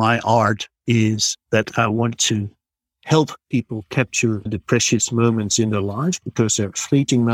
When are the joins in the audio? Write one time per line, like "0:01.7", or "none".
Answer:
none